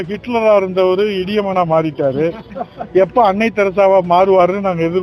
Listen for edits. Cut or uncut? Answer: uncut